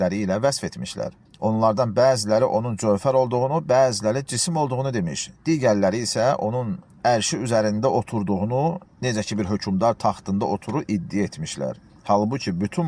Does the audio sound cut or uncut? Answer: uncut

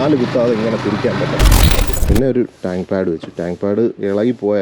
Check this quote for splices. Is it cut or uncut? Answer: cut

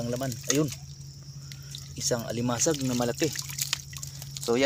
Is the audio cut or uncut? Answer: uncut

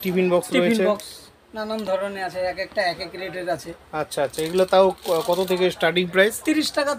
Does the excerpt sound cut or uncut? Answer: uncut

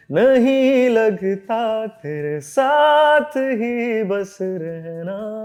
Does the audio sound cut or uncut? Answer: uncut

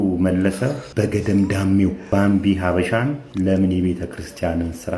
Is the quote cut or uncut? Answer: cut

